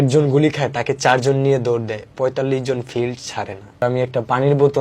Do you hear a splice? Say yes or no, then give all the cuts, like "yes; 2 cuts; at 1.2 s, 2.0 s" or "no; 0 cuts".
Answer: yes; 1 cut; at 3.8 s